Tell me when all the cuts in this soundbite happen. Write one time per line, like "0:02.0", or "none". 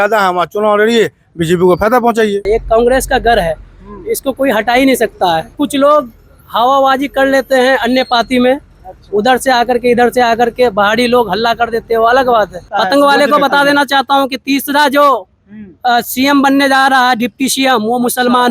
0:02.4
0:05.5
0:12.6